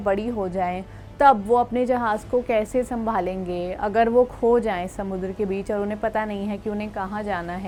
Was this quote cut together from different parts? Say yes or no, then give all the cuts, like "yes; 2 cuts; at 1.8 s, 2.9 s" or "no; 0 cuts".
no; 0 cuts